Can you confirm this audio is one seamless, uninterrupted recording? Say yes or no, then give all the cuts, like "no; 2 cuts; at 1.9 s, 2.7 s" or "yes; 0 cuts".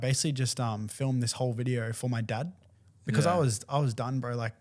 yes; 0 cuts